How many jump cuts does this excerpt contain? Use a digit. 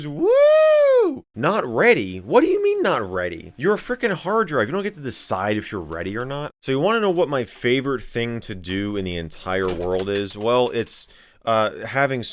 2